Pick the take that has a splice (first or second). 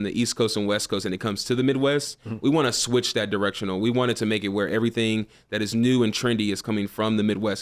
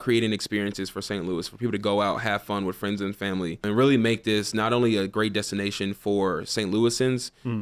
second